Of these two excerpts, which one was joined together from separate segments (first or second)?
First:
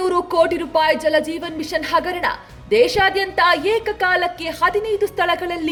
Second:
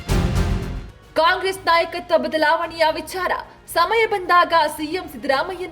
second